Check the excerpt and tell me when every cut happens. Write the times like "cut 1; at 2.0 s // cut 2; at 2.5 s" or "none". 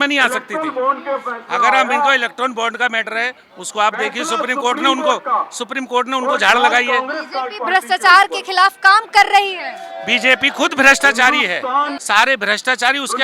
cut 1; at 12.0 s